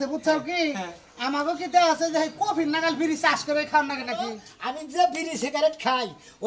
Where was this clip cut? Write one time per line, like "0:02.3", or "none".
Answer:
0:04.5

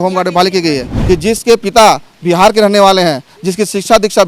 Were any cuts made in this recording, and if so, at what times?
0:00.9

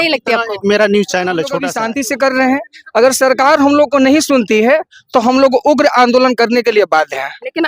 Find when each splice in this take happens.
0:01.7

